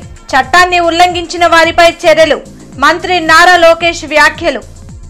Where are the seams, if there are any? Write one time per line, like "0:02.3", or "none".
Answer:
none